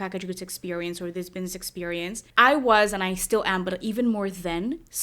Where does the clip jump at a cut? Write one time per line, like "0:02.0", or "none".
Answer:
0:02.2